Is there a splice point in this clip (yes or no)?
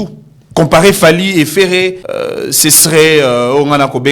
yes